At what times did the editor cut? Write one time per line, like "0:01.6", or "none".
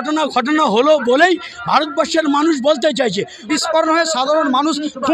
0:03.4